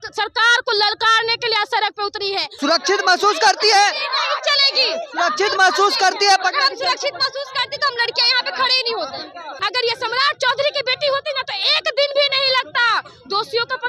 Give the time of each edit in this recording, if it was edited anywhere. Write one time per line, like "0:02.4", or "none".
0:02.6
0:09.5